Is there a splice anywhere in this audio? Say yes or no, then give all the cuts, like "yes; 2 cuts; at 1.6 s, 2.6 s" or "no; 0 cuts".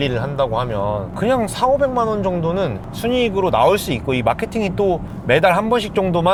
no; 0 cuts